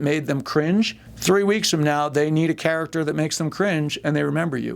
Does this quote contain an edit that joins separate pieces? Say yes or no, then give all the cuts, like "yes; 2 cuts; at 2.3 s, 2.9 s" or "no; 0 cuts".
yes; 1 cut; at 1.1 s